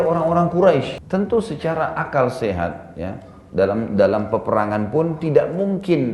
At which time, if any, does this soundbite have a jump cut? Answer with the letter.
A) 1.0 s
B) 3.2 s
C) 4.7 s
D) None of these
A